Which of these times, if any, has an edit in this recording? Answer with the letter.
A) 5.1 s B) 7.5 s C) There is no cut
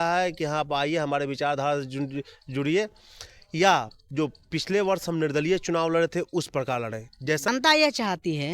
B